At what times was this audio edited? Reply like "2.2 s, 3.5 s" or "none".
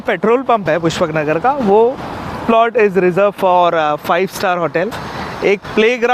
2.4 s, 5.0 s